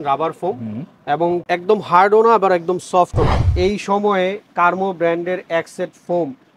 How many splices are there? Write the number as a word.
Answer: one